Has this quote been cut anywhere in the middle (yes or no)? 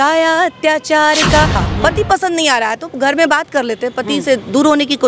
yes